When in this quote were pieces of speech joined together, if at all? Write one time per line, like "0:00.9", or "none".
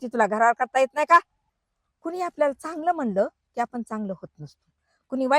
0:01.4